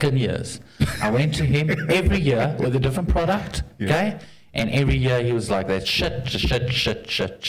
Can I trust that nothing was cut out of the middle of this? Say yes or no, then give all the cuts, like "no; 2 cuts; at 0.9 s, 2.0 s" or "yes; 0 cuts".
yes; 0 cuts